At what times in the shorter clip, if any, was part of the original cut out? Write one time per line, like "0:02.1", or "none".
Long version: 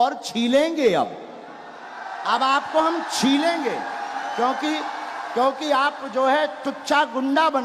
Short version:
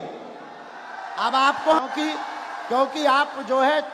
0:01.8